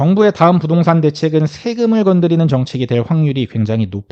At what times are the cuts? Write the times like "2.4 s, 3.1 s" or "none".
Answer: none